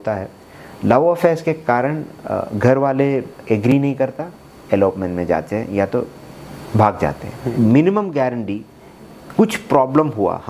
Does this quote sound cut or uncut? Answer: cut